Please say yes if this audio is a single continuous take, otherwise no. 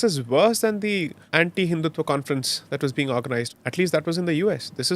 no